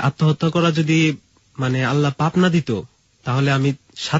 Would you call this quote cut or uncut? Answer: uncut